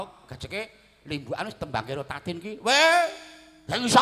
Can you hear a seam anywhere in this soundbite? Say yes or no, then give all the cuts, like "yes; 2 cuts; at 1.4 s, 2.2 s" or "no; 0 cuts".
no; 0 cuts